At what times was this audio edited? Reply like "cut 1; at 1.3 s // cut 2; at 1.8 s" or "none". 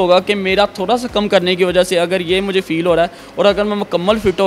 none